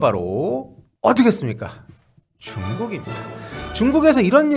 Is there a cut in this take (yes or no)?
no